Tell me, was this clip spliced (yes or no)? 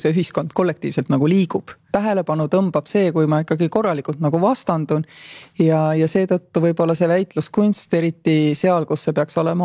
yes